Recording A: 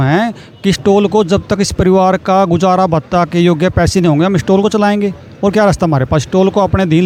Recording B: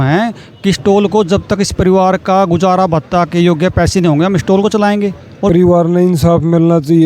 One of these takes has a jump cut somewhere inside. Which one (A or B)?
B